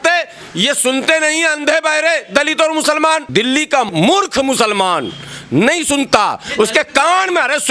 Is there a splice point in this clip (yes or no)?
yes